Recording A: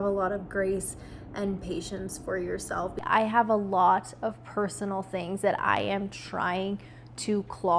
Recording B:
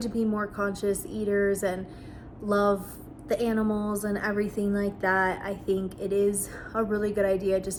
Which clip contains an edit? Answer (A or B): A